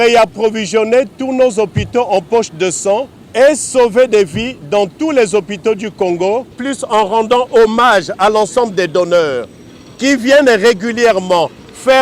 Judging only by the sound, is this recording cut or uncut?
cut